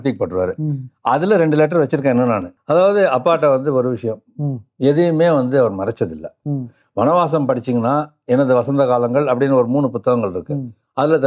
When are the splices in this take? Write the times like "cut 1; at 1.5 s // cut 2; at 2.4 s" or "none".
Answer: cut 1; at 2.5 s